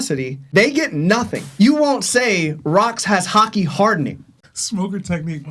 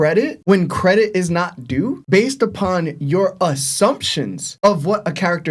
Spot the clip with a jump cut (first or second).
first